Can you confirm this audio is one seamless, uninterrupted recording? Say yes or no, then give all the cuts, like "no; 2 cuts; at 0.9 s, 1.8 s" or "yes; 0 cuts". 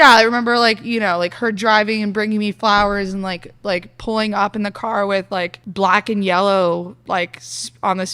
no; 2 cuts; at 5.6 s, 7.0 s